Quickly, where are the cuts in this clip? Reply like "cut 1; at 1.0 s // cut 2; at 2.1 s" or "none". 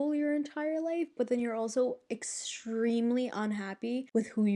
none